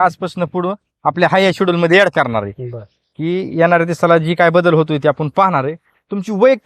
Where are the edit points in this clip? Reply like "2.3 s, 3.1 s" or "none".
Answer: none